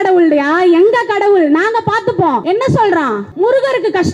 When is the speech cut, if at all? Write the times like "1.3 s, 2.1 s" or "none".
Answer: 2.4 s, 3.2 s